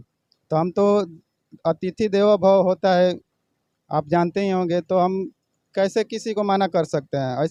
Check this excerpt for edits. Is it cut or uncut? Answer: uncut